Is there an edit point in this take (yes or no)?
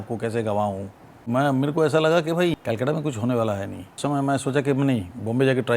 yes